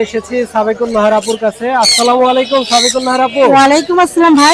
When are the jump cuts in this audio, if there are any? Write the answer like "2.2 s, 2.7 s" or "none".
none